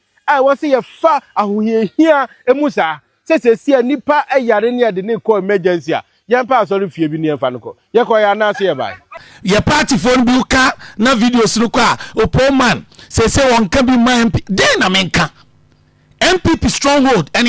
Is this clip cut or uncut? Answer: cut